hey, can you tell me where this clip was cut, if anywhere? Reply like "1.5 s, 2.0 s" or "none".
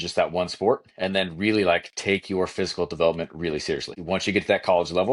3.9 s